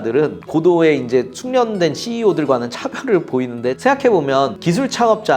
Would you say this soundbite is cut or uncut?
cut